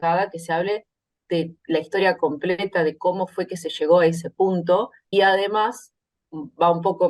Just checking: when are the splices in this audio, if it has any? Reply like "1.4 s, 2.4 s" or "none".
5.0 s